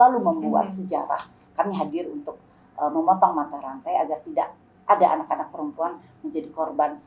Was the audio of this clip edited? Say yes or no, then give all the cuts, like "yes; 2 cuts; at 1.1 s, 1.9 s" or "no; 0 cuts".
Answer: yes; 1 cut; at 1.4 s